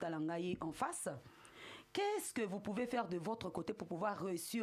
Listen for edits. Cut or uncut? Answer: uncut